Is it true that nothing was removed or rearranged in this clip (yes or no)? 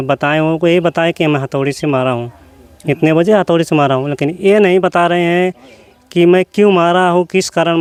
yes